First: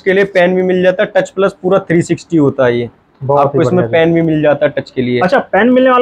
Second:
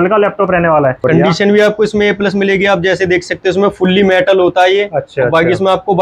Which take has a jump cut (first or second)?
second